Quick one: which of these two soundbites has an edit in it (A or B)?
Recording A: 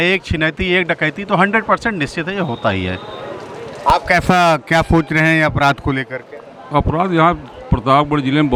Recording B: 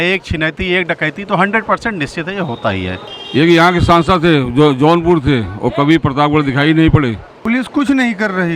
B